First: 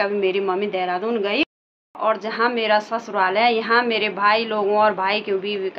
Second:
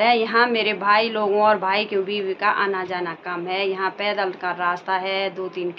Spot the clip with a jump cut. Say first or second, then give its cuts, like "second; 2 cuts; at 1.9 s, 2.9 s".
first; 1 cut; at 1.5 s